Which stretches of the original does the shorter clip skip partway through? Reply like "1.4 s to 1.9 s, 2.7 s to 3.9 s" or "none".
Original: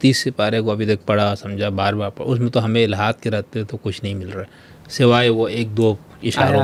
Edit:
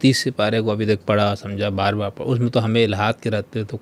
none